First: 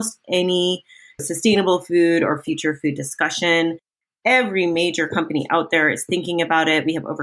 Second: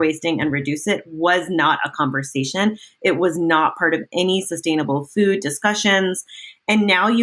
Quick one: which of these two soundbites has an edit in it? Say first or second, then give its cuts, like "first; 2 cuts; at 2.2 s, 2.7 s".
first; 1 cut; at 1.2 s